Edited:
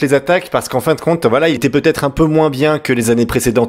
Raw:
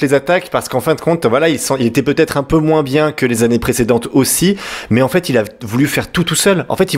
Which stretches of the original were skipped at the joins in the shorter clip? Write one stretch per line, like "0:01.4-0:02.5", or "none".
0:01.6-0:01.9